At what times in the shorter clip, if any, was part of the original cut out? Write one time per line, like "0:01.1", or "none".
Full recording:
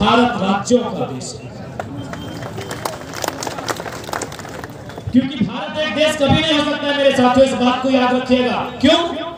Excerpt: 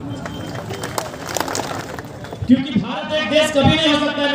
0:01.8